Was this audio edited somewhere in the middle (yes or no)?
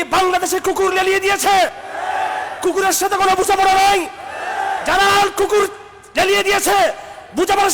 yes